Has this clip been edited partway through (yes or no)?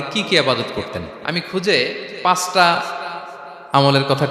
no